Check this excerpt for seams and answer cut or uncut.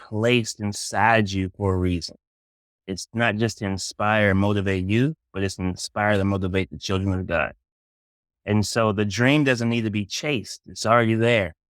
uncut